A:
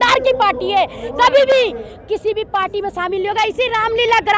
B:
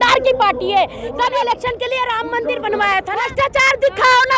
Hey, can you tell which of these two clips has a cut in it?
B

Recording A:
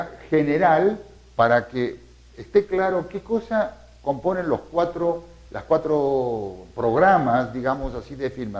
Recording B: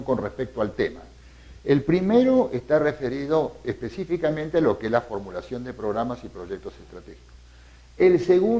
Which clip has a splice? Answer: A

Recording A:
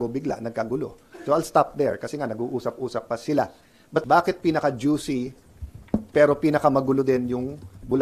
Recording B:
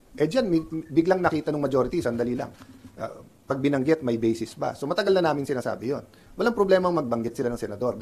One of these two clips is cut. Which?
A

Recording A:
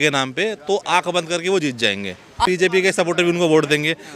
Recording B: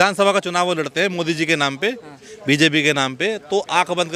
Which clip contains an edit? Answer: A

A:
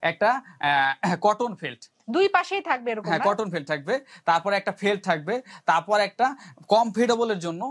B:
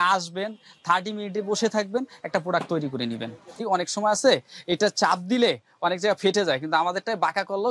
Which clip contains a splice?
B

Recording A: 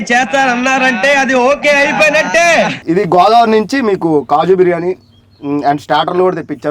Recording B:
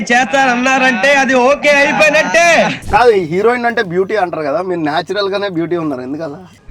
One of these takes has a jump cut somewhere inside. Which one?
B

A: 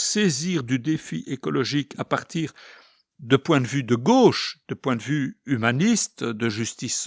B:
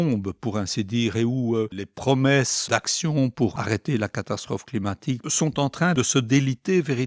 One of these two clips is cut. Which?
B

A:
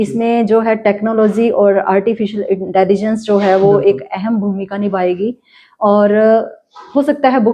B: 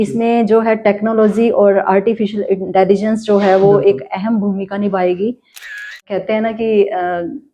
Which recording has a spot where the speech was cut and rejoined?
B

